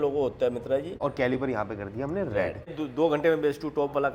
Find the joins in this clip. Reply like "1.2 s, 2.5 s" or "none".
1.0 s, 2.7 s